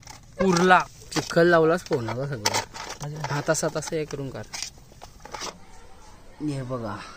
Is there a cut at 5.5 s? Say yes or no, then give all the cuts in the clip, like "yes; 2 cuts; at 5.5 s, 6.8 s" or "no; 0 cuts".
yes; 2 cuts; at 1.0 s, 5.5 s